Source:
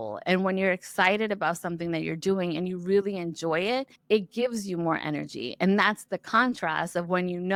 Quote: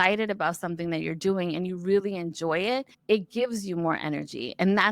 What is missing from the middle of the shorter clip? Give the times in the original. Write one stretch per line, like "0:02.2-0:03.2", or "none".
none